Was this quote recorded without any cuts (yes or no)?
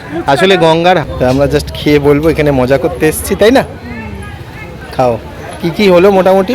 no